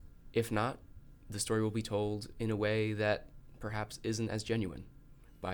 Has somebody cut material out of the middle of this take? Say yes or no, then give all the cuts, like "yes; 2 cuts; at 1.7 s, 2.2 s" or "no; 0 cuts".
no; 0 cuts